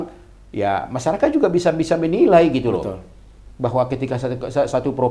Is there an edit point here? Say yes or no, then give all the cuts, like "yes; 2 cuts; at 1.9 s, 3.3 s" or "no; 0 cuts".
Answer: no; 0 cuts